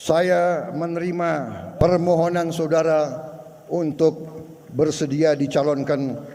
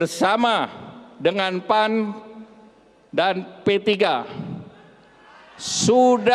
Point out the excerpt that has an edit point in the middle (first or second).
first